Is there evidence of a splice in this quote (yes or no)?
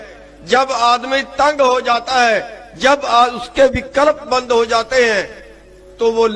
no